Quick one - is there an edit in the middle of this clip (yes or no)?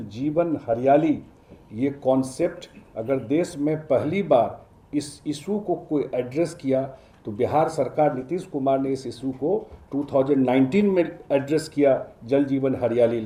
no